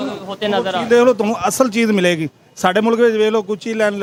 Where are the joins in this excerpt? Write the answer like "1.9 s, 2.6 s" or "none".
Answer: none